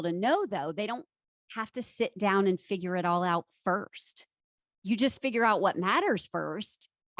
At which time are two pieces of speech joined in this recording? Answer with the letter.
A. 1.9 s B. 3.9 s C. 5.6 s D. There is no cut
D